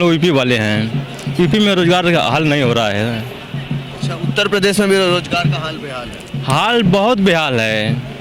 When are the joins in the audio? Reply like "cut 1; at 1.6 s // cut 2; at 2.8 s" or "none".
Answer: none